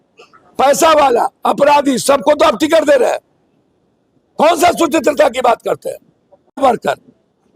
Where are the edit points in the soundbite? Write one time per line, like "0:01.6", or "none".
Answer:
0:06.6